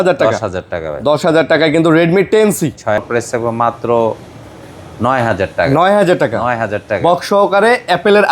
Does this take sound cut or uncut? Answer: cut